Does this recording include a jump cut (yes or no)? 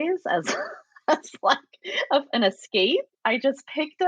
yes